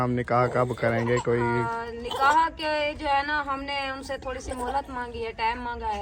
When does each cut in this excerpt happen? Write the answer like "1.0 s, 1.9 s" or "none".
none